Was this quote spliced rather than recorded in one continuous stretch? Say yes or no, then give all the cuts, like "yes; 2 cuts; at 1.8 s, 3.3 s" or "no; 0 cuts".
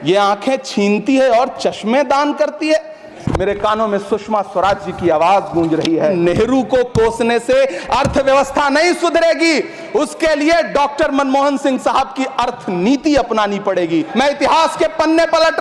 yes; 3 cuts; at 3.1 s, 6.2 s, 14.1 s